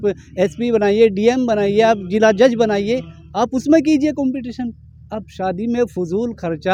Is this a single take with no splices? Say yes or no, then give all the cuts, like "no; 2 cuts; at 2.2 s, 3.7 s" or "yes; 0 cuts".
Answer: yes; 0 cuts